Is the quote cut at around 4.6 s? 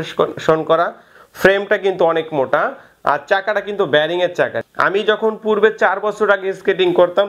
yes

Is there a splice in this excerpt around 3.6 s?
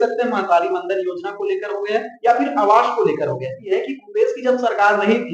yes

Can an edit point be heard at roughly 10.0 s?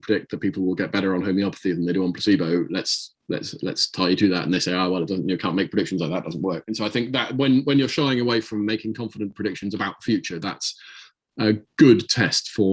no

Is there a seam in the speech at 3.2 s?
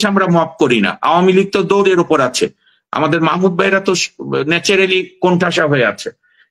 no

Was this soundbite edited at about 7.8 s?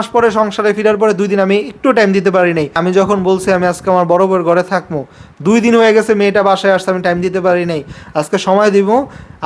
no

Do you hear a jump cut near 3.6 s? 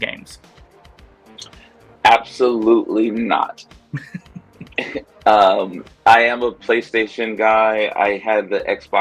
no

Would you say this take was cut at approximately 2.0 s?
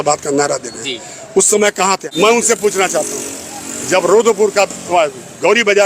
yes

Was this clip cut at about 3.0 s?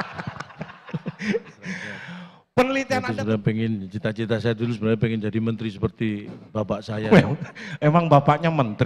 yes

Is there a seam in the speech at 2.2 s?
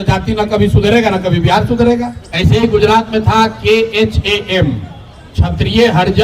yes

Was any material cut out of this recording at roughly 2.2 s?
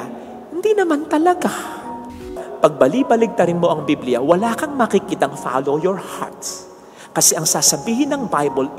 yes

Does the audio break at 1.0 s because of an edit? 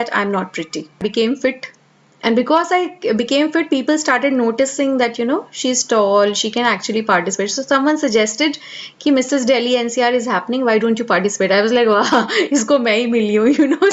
yes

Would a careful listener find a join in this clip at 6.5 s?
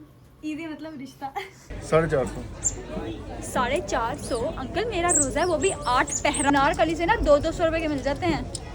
yes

